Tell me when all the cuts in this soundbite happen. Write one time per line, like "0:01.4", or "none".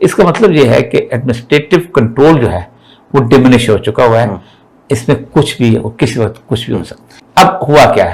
0:07.2